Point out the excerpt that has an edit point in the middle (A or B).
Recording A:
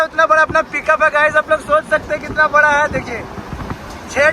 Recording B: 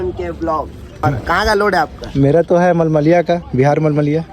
B